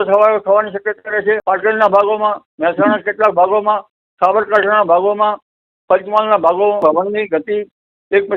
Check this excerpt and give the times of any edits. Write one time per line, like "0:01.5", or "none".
0:01.4
0:06.8